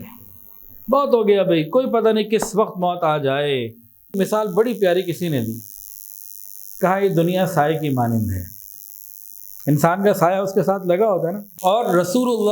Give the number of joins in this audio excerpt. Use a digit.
2